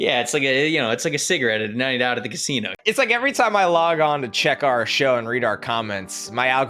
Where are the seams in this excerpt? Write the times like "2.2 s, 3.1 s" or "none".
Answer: 2.8 s